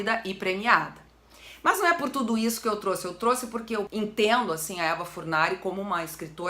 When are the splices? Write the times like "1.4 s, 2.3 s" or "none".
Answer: 3.9 s